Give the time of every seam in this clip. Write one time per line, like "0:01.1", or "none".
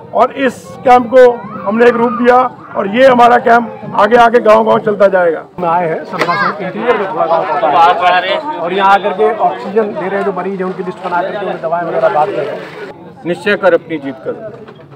0:05.6
0:12.9